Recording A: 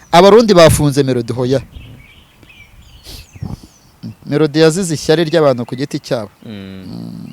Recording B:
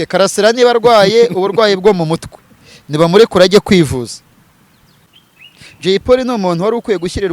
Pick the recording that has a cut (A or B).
B